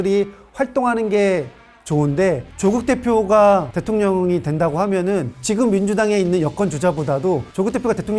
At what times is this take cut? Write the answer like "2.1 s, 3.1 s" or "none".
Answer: 2.5 s